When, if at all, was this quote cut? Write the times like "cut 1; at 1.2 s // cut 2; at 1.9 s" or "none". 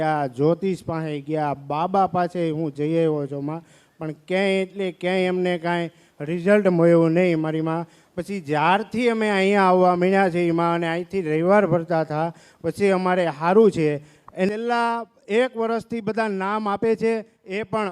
cut 1; at 14.5 s